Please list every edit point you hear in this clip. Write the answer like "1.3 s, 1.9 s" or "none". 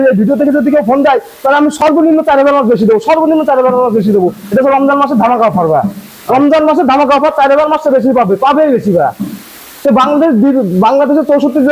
none